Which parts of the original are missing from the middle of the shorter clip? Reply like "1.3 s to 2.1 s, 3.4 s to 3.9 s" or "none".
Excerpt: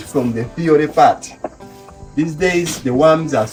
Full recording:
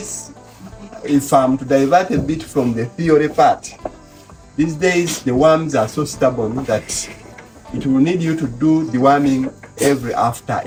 none